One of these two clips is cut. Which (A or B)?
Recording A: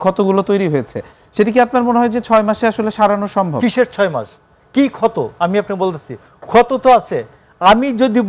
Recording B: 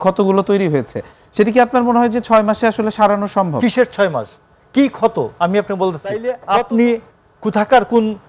B